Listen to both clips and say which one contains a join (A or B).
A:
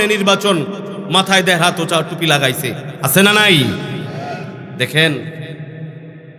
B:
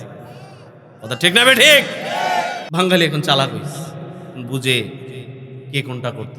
B